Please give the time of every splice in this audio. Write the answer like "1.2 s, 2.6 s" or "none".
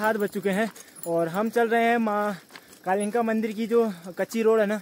none